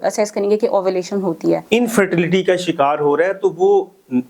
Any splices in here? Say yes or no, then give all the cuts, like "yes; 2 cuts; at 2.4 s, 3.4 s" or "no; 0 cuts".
yes; 1 cut; at 1.6 s